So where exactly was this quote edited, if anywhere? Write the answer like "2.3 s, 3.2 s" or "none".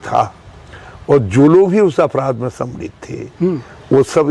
none